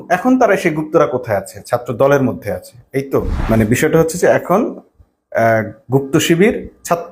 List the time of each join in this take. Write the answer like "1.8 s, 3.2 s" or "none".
3.3 s